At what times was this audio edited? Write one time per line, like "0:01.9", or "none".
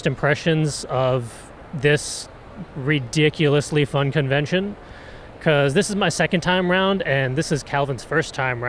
0:07.3